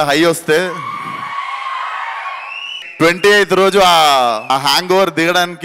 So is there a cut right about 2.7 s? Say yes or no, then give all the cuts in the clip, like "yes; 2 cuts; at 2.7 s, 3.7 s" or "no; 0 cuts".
yes; 2 cuts; at 2.7 s, 4.4 s